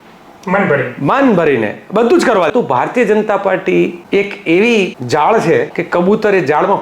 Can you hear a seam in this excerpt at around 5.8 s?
yes; 4 cuts; at 2.5 s, 4.0 s, 5.0 s, 5.8 s

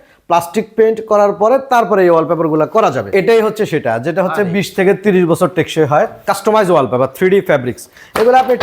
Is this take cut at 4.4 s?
no; 2 cuts; at 3.1 s, 6.3 s

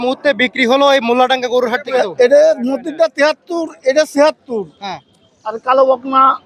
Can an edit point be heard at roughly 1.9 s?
yes; 1 cut; at 1.9 s

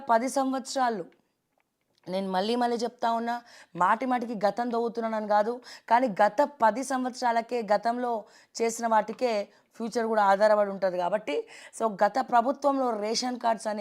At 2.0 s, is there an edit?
yes; 1 cut; at 2.0 s

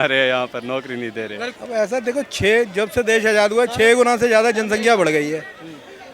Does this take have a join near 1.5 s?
yes; 1 cut; at 1.5 s

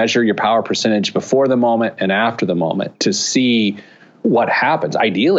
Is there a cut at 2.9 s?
yes; 2 cuts; at 2.9 s, 4.2 s

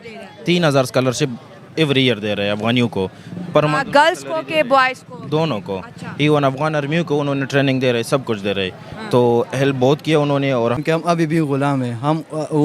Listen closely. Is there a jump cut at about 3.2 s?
no; 1 cut; at 10.8 s

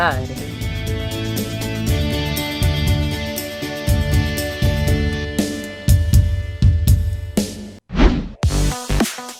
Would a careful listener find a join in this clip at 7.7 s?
yes; 1 cut; at 7.7 s

